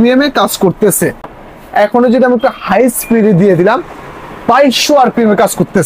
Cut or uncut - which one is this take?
uncut